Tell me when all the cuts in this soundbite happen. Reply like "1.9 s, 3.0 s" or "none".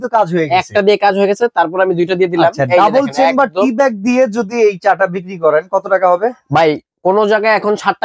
none